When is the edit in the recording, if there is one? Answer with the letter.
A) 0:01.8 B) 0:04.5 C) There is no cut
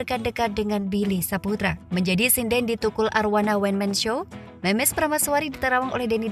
A